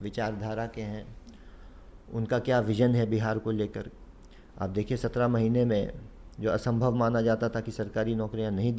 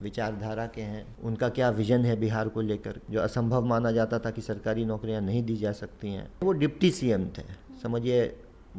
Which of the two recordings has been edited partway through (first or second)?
second